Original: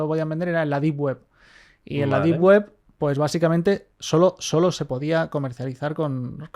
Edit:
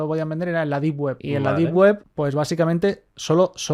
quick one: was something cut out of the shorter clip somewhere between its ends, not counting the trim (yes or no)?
yes